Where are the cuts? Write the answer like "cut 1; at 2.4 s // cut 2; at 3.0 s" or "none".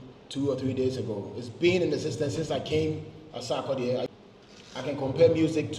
cut 1; at 4.1 s